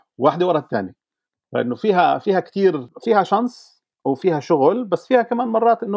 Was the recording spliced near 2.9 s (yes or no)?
yes